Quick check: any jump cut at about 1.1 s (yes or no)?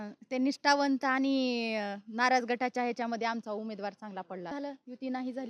no